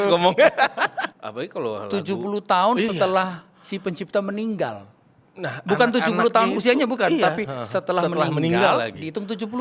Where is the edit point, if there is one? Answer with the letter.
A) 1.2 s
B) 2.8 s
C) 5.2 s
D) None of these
A